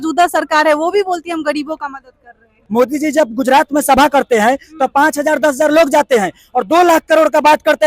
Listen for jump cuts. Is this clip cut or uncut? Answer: cut